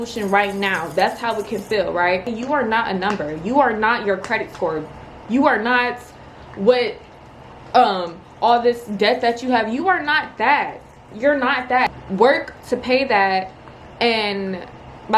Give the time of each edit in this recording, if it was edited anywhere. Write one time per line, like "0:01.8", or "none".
0:02.3
0:12.0

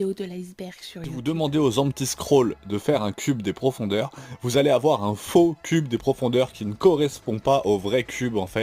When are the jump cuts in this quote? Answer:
0:01.1

